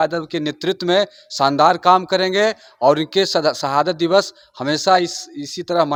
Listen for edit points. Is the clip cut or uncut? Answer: uncut